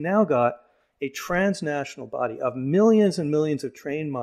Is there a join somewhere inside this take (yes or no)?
no